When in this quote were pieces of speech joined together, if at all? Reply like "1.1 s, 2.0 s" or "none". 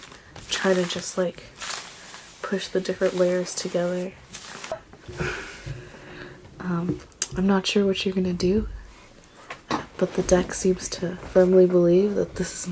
4.5 s